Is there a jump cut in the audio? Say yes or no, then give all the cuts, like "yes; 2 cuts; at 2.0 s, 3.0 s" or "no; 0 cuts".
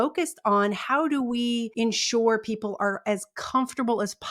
yes; 1 cut; at 1.7 s